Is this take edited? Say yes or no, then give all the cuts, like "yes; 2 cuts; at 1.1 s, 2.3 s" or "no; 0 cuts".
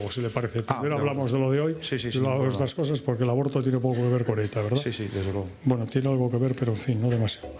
no; 0 cuts